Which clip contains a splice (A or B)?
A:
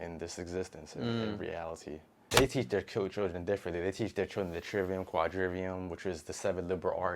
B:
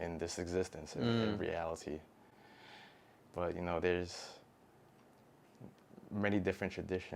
A